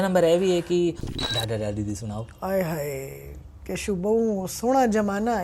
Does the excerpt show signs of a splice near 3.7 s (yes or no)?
no